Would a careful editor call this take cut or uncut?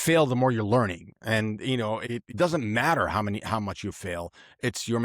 cut